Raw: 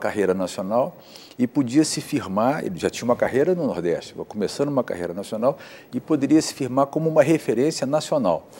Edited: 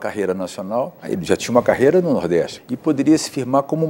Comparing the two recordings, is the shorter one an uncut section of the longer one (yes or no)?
no